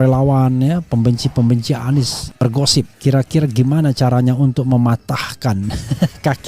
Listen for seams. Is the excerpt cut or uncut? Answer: cut